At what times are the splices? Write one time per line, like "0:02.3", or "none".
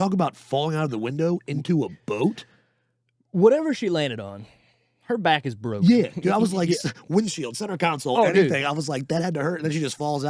none